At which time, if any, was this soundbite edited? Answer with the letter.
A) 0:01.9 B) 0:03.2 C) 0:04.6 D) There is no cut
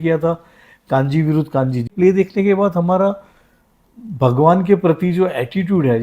A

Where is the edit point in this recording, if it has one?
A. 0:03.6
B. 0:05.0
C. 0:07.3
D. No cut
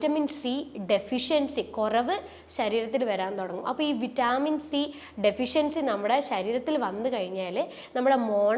D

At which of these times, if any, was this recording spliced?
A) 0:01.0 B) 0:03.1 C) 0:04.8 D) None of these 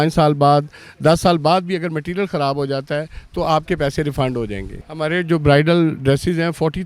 C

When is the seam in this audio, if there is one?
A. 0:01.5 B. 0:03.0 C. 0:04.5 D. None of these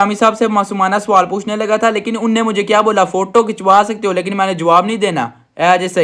D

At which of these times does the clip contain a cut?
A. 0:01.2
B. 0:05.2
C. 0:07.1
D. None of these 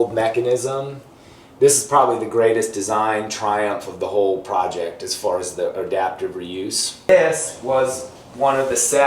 C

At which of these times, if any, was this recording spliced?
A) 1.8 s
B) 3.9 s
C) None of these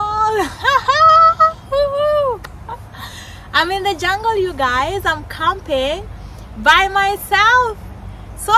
C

